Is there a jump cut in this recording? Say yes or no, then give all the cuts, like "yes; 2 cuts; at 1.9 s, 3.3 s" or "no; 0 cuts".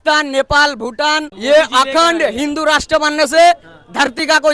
yes; 1 cut; at 1.3 s